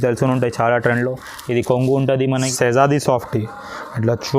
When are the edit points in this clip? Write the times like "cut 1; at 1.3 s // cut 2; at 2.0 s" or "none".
cut 1; at 2.5 s